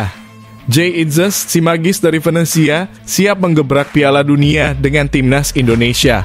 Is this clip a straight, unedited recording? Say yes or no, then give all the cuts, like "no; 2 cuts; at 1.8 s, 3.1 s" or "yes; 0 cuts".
yes; 0 cuts